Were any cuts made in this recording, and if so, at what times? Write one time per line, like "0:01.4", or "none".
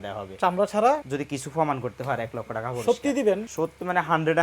0:01.0
0:03.5